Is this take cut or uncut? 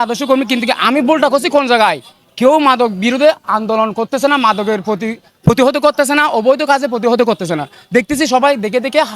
uncut